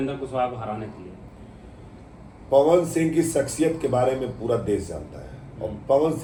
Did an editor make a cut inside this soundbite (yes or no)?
no